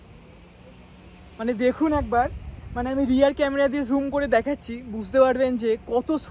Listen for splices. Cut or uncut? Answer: uncut